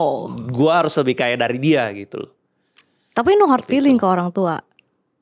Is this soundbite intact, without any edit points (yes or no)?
yes